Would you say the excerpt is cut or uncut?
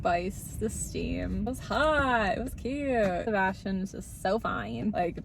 uncut